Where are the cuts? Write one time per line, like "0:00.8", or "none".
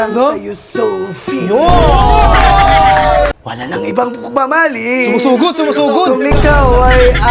0:03.3